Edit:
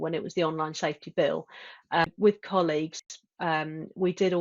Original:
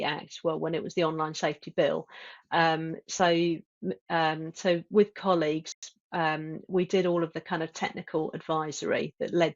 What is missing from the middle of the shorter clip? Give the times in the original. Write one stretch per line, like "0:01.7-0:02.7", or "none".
0:02.6-0:04.8